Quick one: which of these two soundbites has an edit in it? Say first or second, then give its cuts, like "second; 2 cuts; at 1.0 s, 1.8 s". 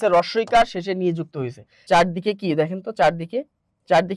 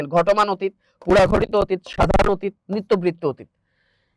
first; 1 cut; at 1.8 s